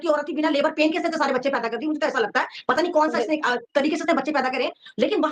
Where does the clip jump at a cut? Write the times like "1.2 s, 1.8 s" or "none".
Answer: none